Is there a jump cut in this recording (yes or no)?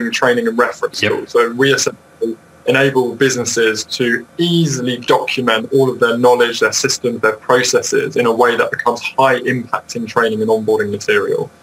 no